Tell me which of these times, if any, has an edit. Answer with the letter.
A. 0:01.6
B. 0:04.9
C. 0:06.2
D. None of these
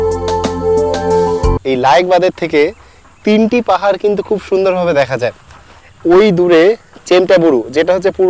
A